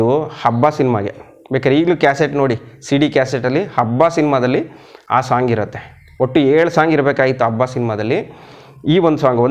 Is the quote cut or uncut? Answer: uncut